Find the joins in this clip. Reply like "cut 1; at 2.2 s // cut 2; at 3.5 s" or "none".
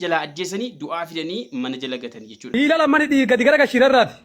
cut 1; at 2.6 s